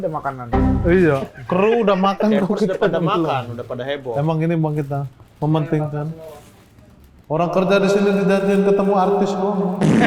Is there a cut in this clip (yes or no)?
no